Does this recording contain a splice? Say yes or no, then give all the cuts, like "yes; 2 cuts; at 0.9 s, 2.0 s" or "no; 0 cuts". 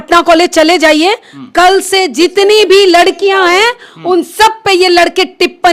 no; 0 cuts